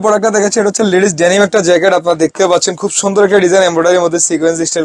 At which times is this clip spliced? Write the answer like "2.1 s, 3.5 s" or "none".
none